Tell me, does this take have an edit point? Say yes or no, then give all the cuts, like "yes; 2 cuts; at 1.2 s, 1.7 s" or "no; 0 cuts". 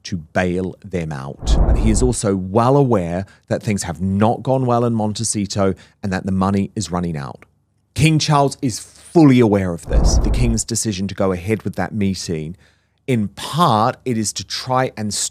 yes; 2 cuts; at 1.8 s, 10.2 s